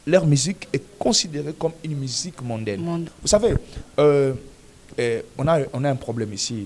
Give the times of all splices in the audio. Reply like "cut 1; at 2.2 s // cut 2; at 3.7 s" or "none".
cut 1; at 3.1 s